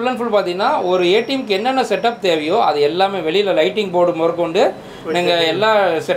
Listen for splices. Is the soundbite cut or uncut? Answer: uncut